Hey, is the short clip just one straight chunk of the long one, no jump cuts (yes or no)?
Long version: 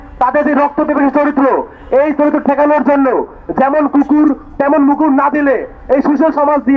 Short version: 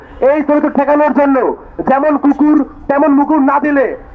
yes